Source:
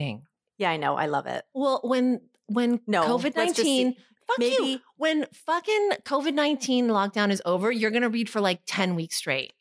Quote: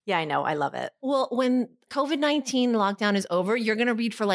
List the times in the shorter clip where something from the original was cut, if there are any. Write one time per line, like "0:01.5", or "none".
0:01.9